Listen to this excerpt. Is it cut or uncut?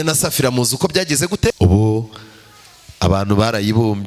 cut